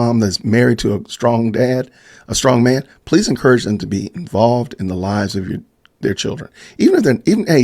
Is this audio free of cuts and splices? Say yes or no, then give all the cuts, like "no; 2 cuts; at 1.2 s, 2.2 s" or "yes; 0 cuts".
yes; 0 cuts